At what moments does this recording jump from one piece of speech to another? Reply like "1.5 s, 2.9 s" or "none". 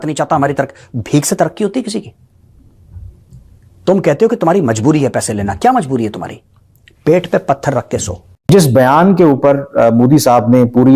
8.5 s